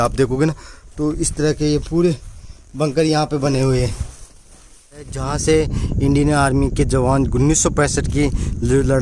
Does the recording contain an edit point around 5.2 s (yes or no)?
yes